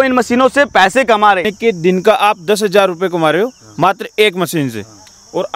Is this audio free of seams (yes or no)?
no